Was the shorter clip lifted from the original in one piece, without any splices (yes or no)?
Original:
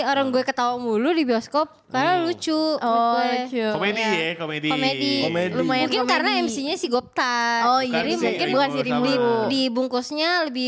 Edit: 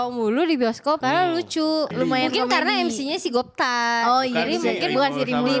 no